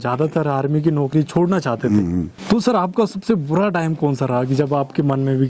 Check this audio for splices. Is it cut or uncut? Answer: uncut